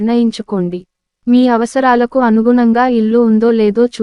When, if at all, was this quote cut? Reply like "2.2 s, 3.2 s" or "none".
none